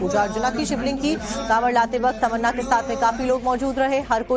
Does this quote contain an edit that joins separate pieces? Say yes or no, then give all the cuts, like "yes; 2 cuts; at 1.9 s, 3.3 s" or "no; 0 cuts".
no; 0 cuts